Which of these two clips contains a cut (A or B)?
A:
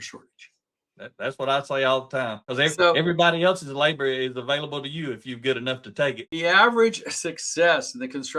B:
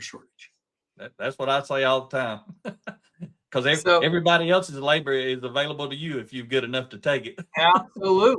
A